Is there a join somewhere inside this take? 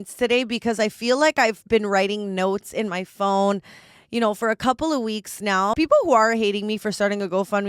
yes; 1 cut; at 5.7 s

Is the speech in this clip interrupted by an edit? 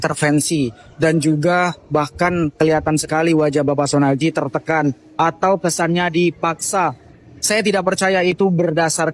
no; 0 cuts

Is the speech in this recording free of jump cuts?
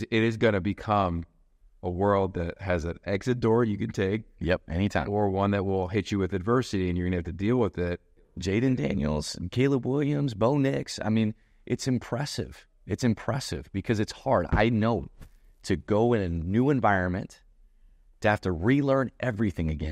no; 1 cut; at 8.3 s

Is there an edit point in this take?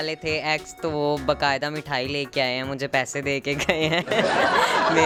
no; 0 cuts

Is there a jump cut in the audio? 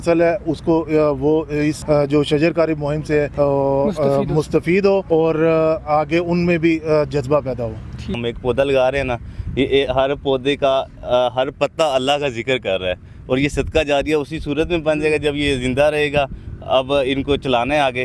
yes; 1 cut; at 8.1 s

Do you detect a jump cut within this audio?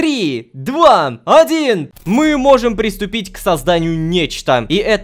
yes; 1 cut; at 2.0 s

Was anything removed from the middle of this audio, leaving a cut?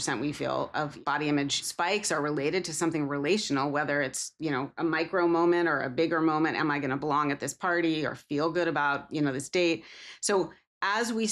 yes; 2 cuts; at 1.0 s, 1.7 s

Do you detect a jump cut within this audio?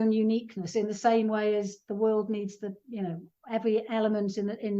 no; 0 cuts

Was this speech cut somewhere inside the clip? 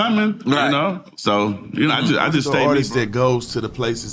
yes; 1 cut; at 2.4 s

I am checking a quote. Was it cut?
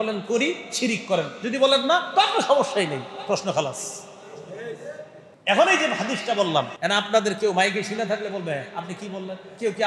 yes; 2 cuts; at 5.2 s, 6.7 s

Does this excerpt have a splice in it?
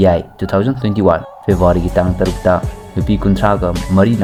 no; 0 cuts

